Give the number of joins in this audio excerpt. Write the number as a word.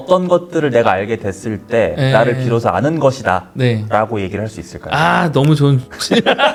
zero